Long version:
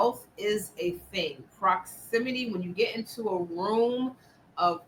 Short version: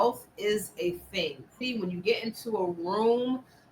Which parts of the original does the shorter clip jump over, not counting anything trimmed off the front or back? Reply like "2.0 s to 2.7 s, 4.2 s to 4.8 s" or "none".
1.6 s to 2.3 s

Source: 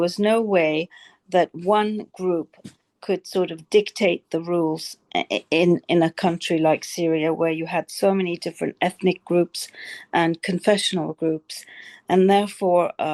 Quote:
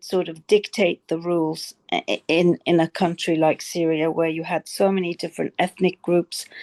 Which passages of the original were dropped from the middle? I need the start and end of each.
none

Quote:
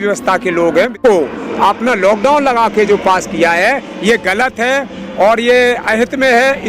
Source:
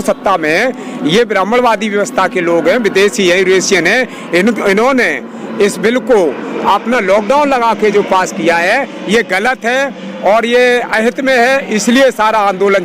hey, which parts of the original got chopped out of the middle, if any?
2.9 s to 6.0 s

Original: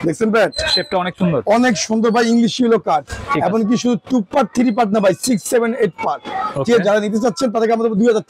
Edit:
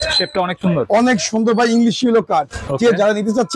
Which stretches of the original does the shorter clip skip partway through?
3.2 s to 6.5 s

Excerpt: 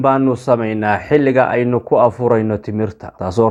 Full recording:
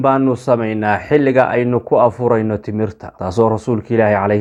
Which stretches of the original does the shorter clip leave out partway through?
none

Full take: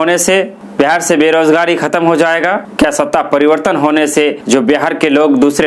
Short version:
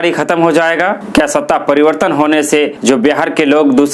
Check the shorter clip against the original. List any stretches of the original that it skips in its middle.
none

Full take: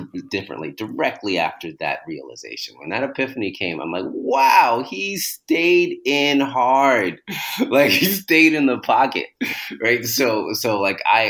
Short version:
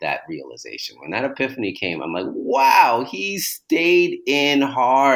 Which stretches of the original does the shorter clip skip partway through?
none

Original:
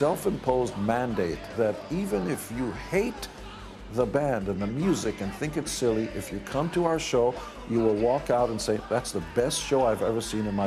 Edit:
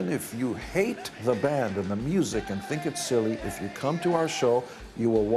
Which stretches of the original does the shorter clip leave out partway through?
3.3 s to 3.8 s

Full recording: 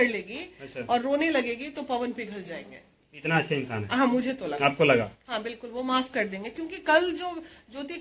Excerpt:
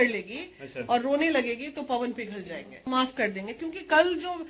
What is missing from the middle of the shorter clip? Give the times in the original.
2.9 s to 5.8 s

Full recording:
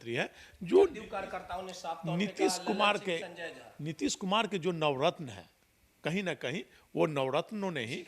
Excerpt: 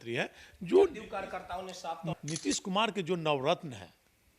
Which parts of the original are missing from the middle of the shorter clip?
2.1 s to 3.6 s

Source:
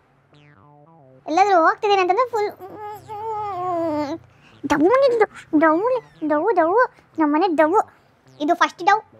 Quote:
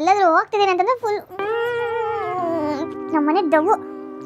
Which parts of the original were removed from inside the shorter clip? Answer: 4.3 s to 7.0 s

